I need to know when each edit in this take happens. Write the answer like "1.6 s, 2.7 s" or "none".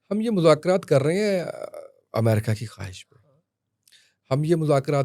none